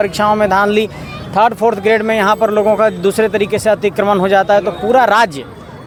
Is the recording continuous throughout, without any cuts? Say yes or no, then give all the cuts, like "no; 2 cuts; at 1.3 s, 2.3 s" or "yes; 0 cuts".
yes; 0 cuts